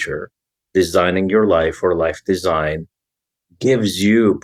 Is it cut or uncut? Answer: uncut